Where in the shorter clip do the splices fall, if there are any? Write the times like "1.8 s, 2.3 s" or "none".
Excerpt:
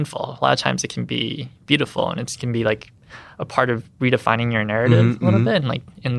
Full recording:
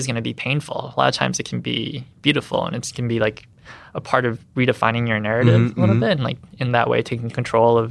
none